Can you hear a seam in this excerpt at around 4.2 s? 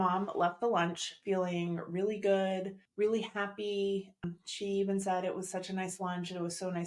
yes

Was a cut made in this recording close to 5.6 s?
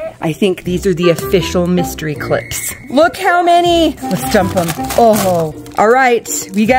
yes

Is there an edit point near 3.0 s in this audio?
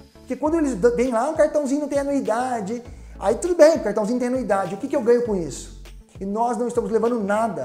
no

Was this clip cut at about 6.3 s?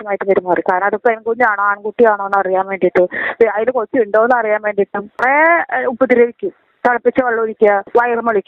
no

